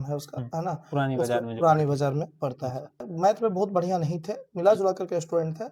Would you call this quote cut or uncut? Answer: cut